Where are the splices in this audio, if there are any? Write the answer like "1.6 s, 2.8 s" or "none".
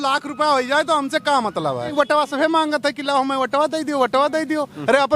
1.9 s